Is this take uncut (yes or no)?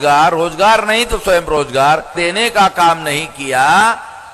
no